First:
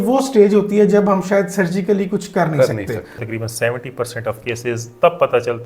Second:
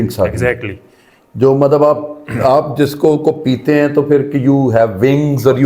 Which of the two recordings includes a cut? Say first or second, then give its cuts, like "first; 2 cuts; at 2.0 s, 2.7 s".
first; 1 cut; at 3.2 s